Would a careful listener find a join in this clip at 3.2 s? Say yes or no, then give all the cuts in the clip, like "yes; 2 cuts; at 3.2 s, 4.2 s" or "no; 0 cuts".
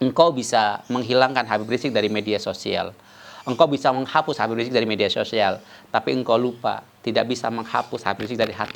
no; 0 cuts